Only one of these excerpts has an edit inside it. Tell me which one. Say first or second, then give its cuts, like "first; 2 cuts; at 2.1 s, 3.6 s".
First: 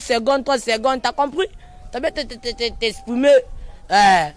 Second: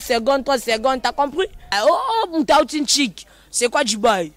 second; 1 cut; at 1.7 s